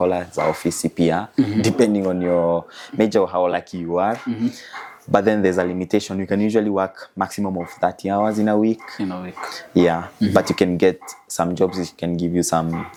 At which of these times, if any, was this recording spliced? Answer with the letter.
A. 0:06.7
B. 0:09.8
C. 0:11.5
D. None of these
D